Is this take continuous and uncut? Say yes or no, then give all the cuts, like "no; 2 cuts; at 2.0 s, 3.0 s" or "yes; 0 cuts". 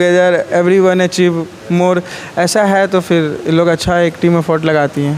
yes; 0 cuts